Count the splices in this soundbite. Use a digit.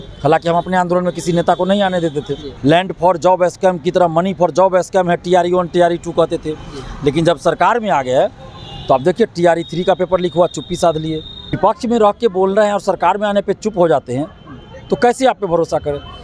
2